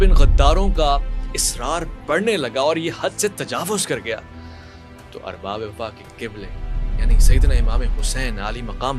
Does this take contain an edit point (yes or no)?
no